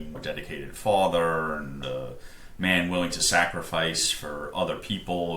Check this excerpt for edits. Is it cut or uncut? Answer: cut